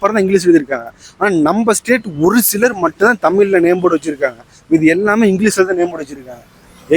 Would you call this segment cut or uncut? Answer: uncut